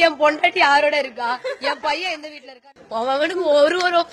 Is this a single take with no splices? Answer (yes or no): no